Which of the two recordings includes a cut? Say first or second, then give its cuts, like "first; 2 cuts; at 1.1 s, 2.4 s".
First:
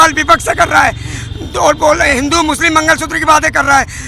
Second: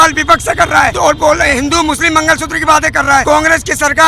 second; 2 cuts; at 0.9 s, 3.2 s